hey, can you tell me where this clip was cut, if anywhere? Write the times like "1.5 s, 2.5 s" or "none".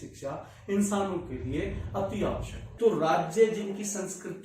2.6 s